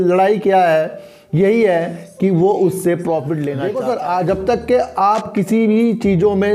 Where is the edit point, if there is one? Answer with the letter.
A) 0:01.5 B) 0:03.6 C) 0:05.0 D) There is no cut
B